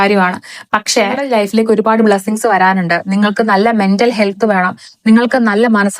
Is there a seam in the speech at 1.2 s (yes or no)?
yes